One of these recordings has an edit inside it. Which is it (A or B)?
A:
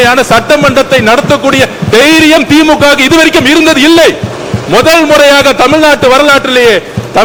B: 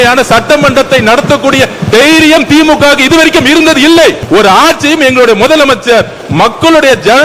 B